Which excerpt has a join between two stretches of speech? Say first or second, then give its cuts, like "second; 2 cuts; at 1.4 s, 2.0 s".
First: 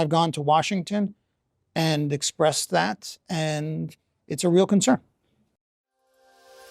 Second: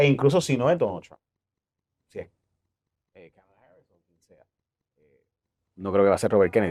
first; 1 cut; at 5.5 s